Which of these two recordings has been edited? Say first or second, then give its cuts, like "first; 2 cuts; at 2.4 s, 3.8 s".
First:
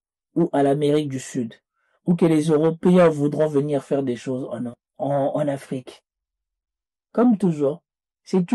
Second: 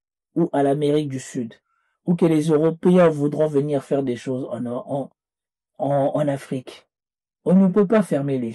first; 2 cuts; at 4.7 s, 6.5 s